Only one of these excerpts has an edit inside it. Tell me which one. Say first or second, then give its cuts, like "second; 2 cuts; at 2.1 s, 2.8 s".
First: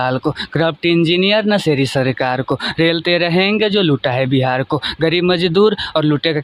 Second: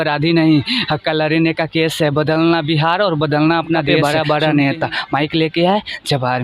second; 1 cut; at 3.9 s